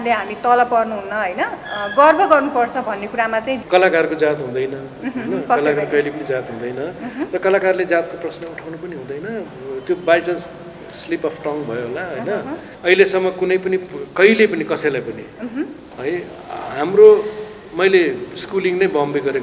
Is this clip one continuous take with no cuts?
no; 2 cuts; at 3.6 s, 12.6 s

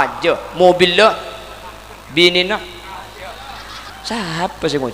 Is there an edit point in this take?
yes; 1 cut; at 3.9 s

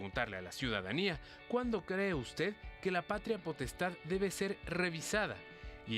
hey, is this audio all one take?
yes; 0 cuts

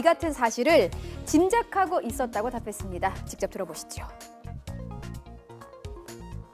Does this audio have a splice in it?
yes; 1 cut; at 3.8 s

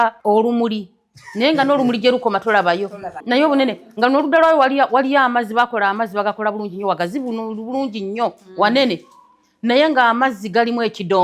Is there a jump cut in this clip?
yes; 1 cut; at 3.1 s

